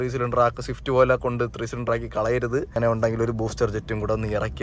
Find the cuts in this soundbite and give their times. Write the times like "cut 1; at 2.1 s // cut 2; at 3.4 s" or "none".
cut 1; at 2.7 s

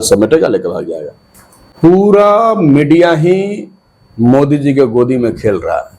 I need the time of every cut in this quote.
cut 1; at 1.7 s

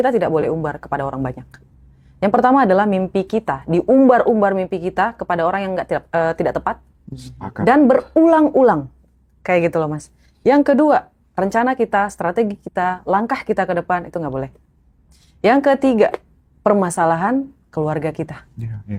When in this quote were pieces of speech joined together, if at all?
none

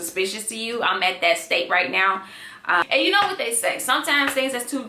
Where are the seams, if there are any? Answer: cut 1; at 2.8 s

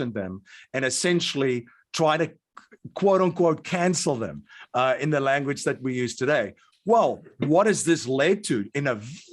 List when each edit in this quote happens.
none

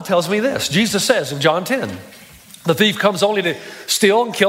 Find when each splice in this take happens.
none

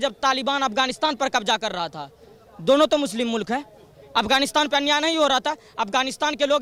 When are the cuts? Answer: none

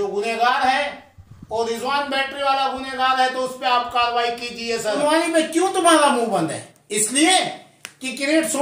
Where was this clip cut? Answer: cut 1; at 5.0 s

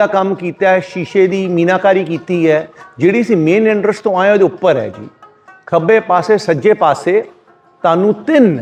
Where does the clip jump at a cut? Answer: none

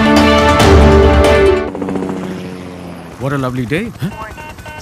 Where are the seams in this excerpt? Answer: cut 1; at 1.7 s

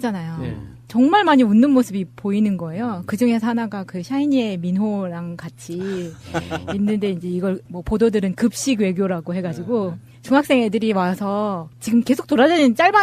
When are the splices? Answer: none

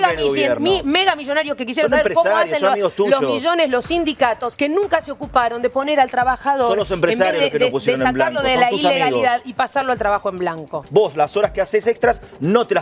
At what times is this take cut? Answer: cut 1; at 4.5 s // cut 2; at 10.8 s

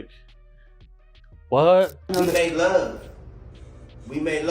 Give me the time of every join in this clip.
cut 1; at 2.0 s

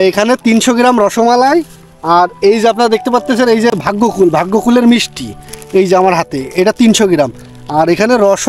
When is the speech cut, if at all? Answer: cut 1; at 3.8 s

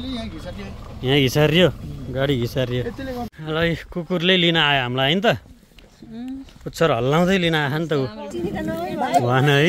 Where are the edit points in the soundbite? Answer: cut 1; at 3.3 s // cut 2; at 8.2 s

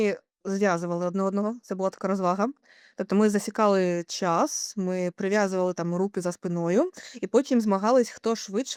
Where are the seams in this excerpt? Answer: none

